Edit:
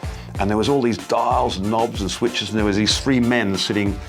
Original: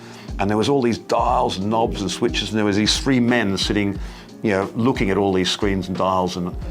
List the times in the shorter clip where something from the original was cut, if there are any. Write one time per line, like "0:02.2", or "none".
none